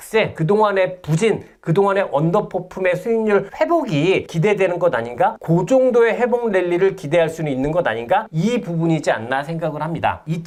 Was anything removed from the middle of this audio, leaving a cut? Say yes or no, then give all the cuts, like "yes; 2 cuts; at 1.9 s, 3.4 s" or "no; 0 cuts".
no; 0 cuts